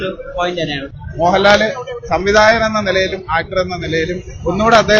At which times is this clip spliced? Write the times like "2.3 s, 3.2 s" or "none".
1.0 s